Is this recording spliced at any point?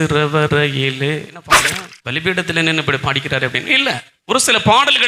yes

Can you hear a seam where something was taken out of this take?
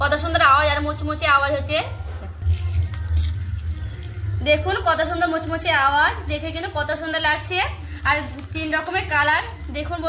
no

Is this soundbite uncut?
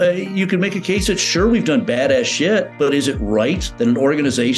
no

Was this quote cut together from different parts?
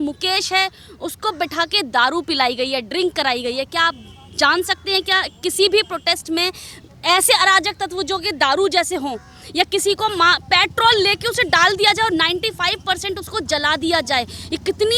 no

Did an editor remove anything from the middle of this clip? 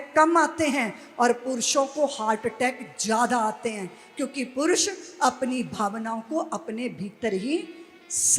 no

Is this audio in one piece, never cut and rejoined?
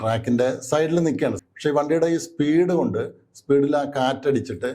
no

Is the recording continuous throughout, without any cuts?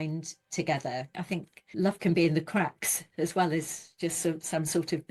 no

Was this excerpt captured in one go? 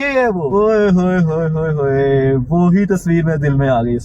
yes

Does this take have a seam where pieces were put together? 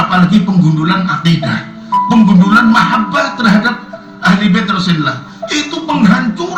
no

